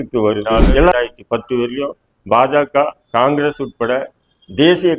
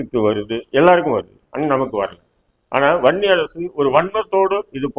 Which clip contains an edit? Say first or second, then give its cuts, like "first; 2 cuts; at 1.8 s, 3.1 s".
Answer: first; 1 cut; at 0.9 s